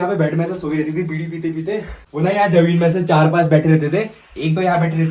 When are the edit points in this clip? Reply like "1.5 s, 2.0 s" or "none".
2.0 s